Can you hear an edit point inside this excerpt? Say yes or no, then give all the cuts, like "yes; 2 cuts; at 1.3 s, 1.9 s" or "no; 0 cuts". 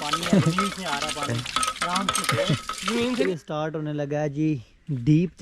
yes; 1 cut; at 3.2 s